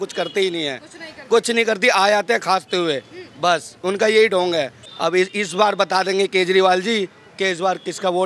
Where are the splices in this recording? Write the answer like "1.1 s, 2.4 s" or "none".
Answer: 4.8 s